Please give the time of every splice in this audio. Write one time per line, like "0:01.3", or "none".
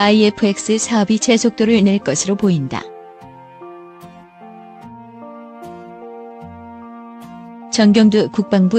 0:02.8
0:07.8